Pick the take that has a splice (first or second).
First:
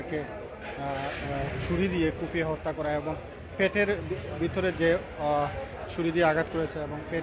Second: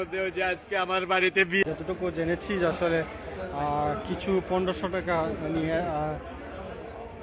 second